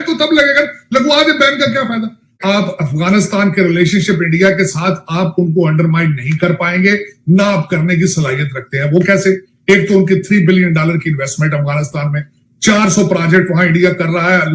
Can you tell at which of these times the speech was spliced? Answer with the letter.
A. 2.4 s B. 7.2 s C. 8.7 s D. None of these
A